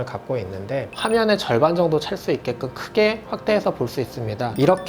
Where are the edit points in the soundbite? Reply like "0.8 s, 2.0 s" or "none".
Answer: 1.0 s